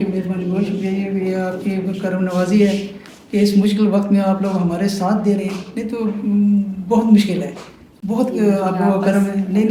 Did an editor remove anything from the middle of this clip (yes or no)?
no